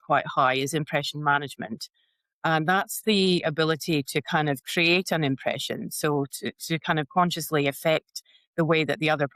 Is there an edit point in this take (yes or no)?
no